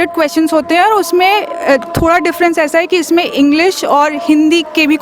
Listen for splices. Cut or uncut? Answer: uncut